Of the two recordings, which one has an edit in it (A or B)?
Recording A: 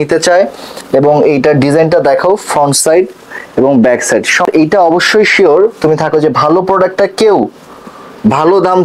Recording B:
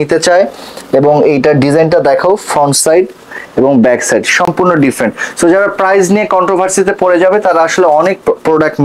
A